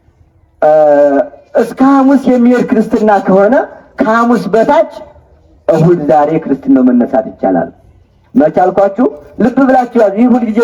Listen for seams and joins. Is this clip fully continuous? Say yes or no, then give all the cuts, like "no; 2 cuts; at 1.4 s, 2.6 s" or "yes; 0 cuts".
yes; 0 cuts